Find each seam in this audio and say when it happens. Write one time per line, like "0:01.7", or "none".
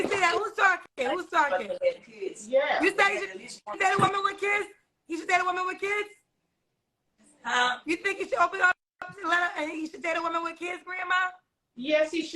0:01.5